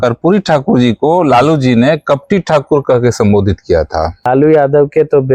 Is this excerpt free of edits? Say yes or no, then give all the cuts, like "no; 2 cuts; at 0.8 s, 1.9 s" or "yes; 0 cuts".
no; 1 cut; at 4.3 s